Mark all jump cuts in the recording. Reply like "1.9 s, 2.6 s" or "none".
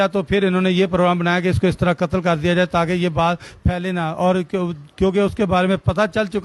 none